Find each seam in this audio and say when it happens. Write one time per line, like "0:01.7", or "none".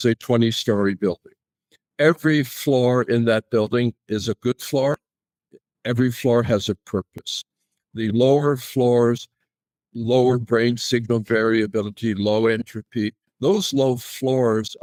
none